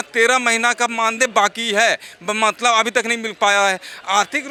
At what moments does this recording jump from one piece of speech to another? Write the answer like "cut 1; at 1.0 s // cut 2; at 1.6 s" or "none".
none